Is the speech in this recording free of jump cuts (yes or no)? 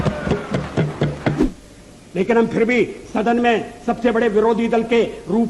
no